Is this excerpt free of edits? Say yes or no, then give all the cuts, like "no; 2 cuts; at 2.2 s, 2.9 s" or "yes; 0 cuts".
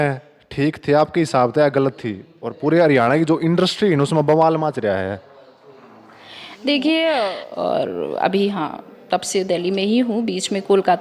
no; 1 cut; at 7.4 s